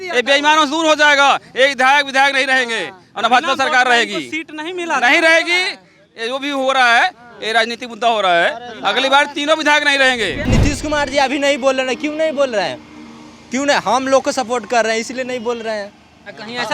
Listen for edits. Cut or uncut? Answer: cut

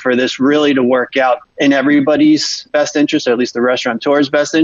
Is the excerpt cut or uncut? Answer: cut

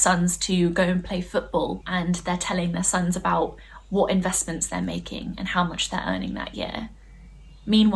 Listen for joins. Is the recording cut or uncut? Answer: cut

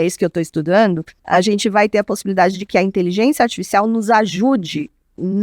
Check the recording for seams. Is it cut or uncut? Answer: cut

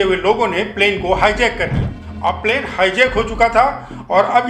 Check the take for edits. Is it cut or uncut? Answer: uncut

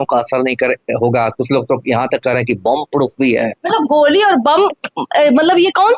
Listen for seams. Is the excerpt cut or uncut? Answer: uncut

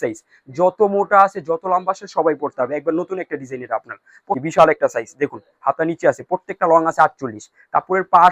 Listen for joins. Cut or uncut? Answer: cut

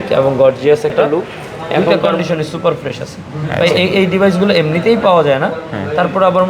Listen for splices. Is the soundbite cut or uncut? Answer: cut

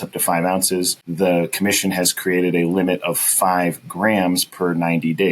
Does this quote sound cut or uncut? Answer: cut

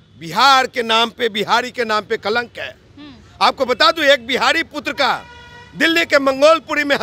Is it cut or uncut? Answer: uncut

